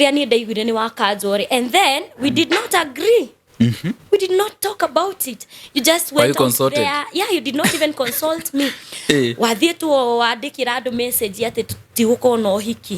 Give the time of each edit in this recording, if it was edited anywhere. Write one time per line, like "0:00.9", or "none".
none